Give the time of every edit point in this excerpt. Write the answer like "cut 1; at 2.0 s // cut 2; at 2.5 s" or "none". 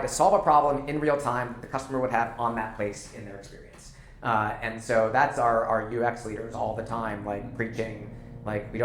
none